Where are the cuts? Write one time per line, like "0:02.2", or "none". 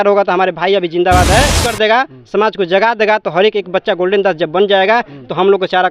0:01.6